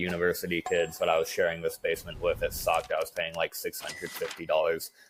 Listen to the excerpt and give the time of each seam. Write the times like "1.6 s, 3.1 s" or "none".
none